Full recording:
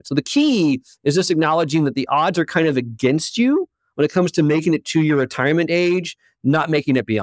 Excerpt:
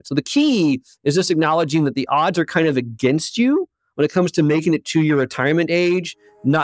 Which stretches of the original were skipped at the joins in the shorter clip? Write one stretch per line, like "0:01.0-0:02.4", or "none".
none